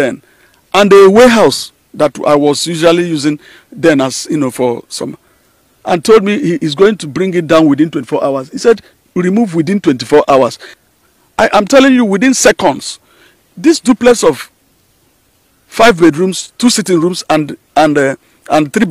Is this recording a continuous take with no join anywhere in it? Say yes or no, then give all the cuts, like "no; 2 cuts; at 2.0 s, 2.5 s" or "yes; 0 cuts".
no; 1 cut; at 10.8 s